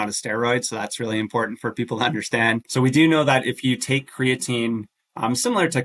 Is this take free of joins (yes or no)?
no